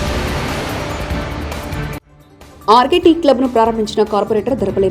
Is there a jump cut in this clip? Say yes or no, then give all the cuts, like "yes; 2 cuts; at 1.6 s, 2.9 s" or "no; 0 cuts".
no; 0 cuts